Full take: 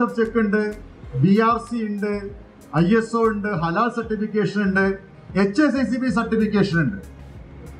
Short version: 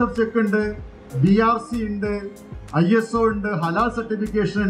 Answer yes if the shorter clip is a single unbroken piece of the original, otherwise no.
yes